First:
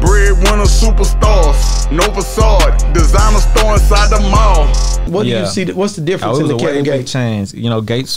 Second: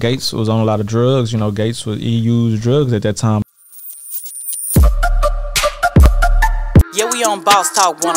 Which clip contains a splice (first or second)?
second